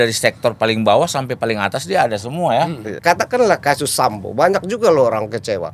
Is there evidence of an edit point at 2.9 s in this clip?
yes; 1 cut; at 2.9 s

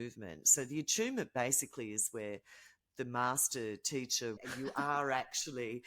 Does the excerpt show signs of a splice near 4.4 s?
yes; 1 cut; at 4.4 s

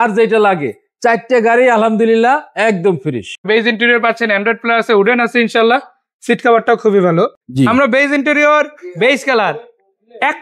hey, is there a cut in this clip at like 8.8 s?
no; 2 cuts; at 3.4 s, 7.4 s

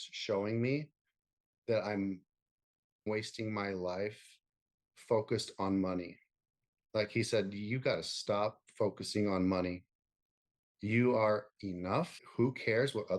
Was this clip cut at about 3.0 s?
yes; 2 cuts; at 3.0 s, 12.2 s

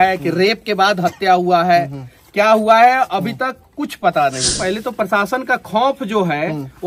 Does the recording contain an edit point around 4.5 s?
yes; 1 cut; at 4.5 s

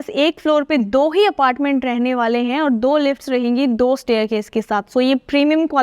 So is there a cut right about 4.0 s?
no; 0 cuts

